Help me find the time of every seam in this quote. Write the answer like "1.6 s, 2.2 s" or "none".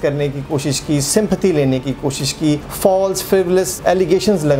2.7 s, 3.7 s

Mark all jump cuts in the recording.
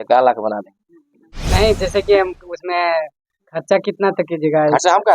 none

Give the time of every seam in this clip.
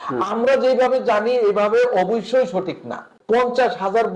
3.1 s

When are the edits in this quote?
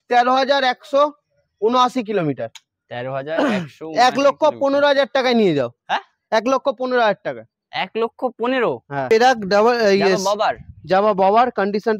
9.1 s

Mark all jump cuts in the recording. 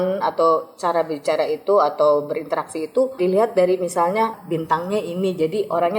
3.1 s, 4.4 s

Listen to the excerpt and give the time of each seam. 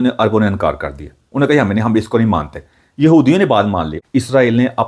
3.9 s

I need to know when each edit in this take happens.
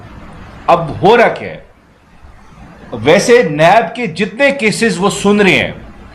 none

